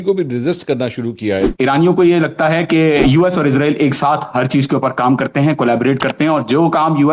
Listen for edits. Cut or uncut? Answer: cut